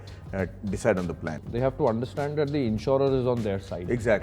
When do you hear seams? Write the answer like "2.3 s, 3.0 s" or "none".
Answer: 1.3 s

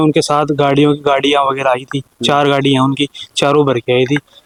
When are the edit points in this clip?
none

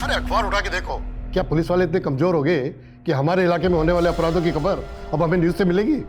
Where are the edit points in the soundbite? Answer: 1.1 s

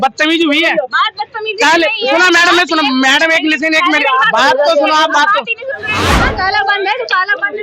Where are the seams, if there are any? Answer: 5.9 s

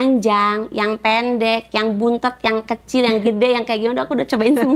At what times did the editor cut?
none

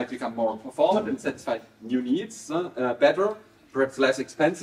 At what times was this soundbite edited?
none

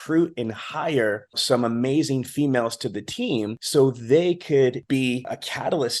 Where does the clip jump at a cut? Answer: 1.4 s, 3.6 s, 4.9 s

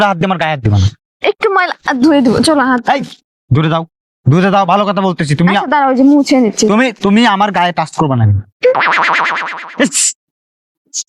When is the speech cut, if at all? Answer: none

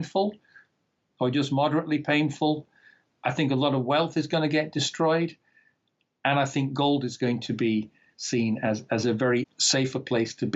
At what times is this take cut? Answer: 9.6 s

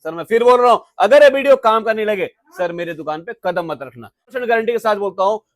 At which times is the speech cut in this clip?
4.4 s

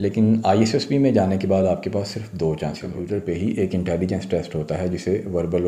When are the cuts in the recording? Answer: 2.9 s

